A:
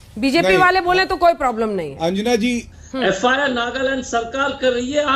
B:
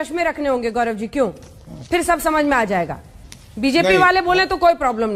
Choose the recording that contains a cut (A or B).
A